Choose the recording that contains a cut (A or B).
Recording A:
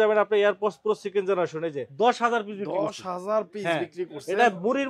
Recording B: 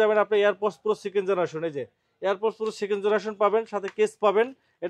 A